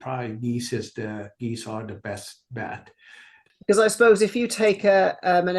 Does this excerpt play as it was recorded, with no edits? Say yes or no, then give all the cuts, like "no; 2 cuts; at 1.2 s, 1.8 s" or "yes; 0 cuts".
no; 1 cut; at 3.4 s